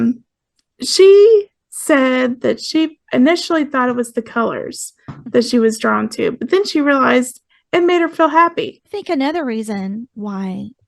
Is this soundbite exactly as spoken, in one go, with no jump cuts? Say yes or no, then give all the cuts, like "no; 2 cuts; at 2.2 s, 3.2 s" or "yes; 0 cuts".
no; 1 cut; at 8.9 s